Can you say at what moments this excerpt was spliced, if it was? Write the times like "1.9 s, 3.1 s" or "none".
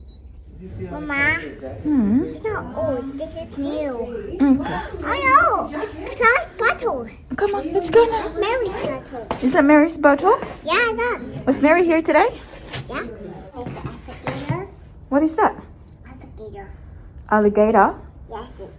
13.7 s